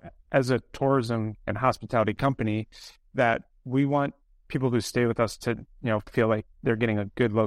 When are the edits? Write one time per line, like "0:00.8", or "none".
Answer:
0:01.4